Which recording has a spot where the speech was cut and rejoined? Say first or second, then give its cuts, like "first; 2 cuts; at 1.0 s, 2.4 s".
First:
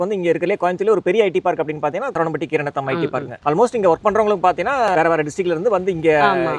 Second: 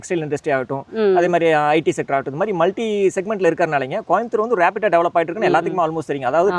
first; 3 cuts; at 2.1 s, 3.3 s, 4.9 s